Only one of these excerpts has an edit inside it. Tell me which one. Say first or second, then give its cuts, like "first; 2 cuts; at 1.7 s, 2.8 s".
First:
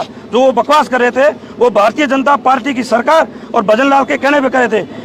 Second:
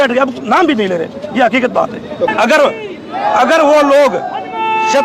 second; 1 cut; at 2.3 s